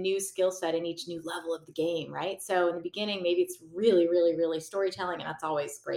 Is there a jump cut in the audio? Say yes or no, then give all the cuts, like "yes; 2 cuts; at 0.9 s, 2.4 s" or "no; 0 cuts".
no; 0 cuts